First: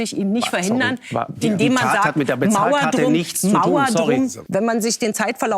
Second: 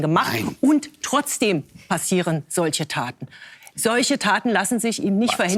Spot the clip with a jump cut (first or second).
first